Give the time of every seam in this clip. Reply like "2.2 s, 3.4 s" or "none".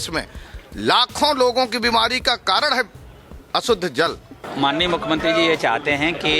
4.4 s